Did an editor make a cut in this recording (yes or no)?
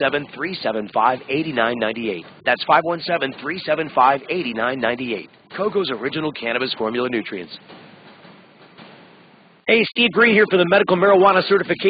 yes